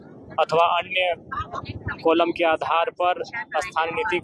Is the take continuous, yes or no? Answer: yes